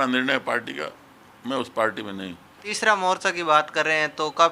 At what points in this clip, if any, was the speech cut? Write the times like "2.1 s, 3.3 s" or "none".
2.8 s